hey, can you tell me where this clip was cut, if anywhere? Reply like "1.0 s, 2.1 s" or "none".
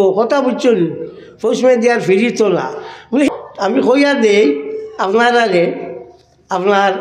3.3 s